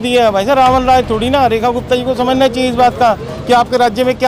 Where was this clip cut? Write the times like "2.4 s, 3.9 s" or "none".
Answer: none